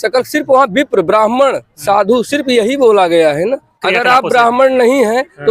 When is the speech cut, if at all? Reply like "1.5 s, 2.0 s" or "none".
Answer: 3.7 s